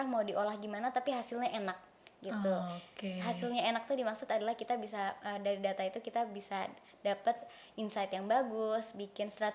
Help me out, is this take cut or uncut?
uncut